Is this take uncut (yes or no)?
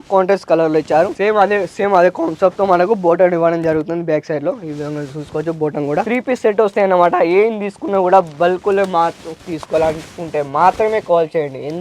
no